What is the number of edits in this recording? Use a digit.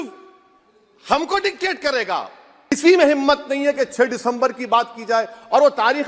1